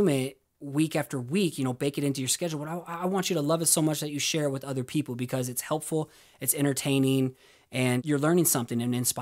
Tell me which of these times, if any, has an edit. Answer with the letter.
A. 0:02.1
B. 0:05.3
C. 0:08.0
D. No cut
C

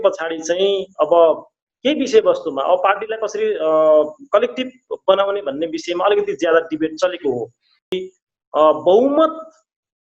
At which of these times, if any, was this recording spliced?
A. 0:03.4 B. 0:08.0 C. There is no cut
B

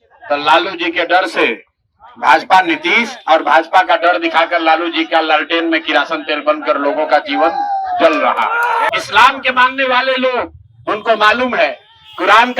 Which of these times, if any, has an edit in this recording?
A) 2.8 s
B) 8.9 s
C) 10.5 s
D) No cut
B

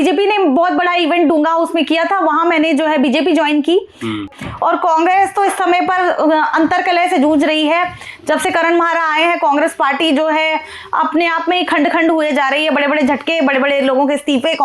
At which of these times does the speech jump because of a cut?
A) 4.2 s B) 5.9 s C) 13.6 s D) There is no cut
A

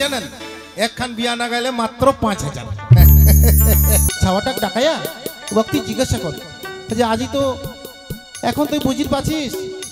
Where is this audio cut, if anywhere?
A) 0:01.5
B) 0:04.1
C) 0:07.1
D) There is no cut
B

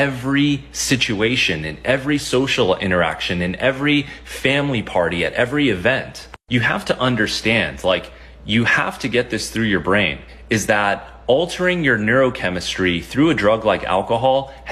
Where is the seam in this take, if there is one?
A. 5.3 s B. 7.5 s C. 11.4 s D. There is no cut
D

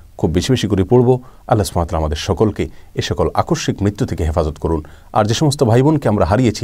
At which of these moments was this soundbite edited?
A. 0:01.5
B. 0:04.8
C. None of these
C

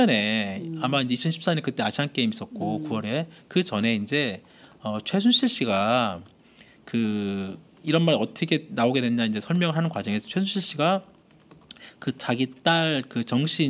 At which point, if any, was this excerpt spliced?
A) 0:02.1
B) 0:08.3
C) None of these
B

